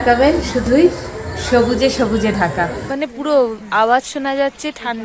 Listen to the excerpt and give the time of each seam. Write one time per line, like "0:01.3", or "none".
0:02.8